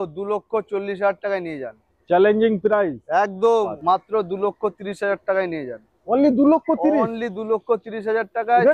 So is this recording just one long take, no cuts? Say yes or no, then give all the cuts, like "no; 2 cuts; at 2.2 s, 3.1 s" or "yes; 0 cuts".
no; 1 cut; at 3.8 s